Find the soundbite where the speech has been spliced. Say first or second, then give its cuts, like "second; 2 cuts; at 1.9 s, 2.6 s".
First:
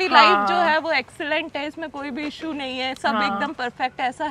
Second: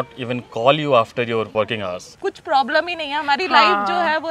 second; 1 cut; at 1.8 s